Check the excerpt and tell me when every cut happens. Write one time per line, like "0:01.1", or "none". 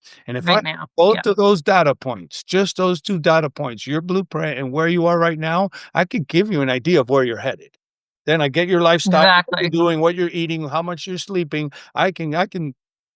none